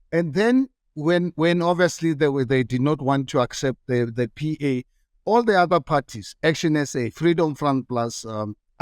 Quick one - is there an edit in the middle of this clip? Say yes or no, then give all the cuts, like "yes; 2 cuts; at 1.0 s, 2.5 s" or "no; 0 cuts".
no; 0 cuts